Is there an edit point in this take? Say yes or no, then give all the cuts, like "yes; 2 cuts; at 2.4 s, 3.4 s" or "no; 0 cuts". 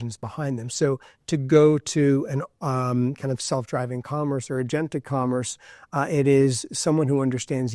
no; 0 cuts